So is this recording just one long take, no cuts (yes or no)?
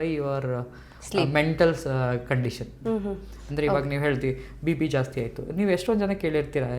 yes